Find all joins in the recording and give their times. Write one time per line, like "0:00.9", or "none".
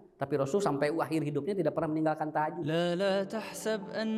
0:02.7